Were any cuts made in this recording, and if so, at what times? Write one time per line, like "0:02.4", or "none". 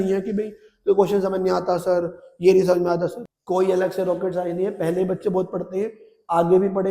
0:03.2